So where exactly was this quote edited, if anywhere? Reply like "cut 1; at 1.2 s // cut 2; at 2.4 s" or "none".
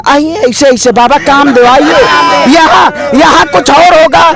none